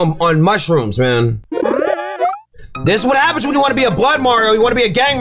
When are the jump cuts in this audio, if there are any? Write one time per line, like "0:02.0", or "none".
0:01.4